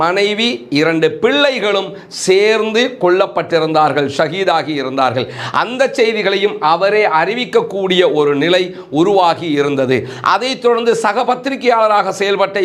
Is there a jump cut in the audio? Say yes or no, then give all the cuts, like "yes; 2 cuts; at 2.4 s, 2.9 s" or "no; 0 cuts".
no; 0 cuts